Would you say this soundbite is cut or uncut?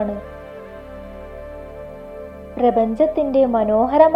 uncut